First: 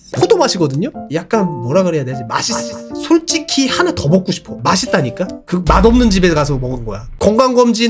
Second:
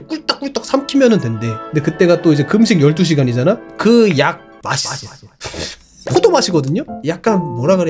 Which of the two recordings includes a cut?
first; 1 cut; at 4.5 s

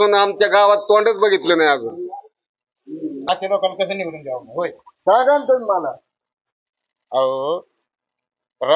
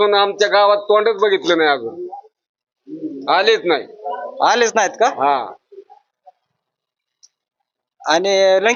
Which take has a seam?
first; 1 cut; at 3.2 s

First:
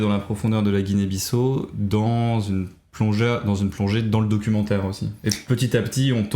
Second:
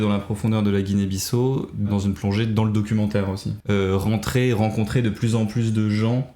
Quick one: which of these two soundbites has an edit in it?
second; 2 cuts; at 1.9 s, 3.5 s

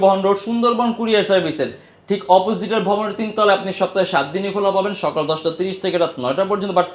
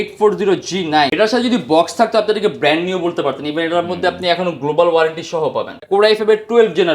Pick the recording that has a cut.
second; 2 cuts; at 1.1 s, 5.8 s

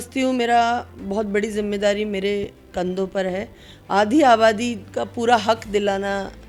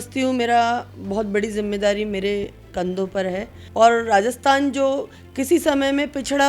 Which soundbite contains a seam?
second; 1 cut; at 3.6 s

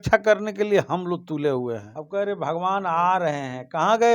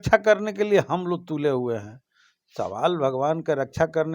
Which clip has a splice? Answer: first; 1 cut; at 1.9 s

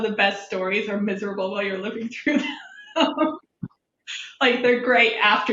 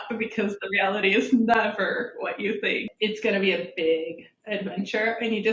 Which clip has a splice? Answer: second; 1 cut; at 2.9 s

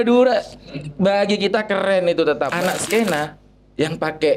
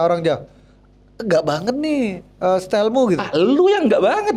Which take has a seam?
first; 1 cut; at 2.5 s

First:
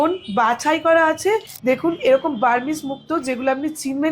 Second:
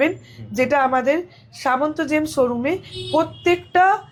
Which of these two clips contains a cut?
first; 1 cut; at 1.5 s

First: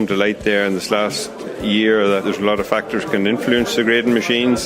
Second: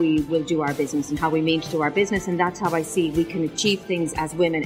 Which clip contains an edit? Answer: first; 1 cut; at 2.2 s

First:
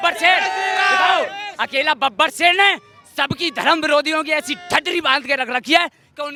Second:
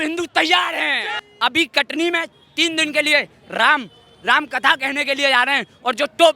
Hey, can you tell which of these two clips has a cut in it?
second; 1 cut; at 1.2 s

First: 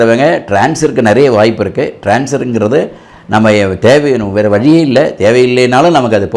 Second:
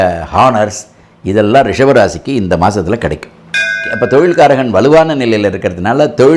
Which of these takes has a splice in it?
second; 1 cut; at 3.8 s

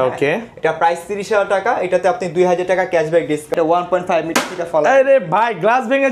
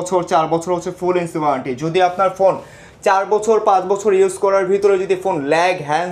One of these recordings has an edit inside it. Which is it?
first; 1 cut; at 3.5 s

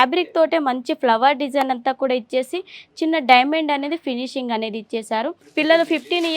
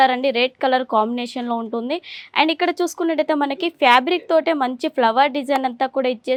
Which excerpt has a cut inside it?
first; 1 cut; at 5.4 s

